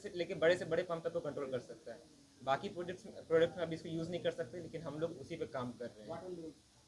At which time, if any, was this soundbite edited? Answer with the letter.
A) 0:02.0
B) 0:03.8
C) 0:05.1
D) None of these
D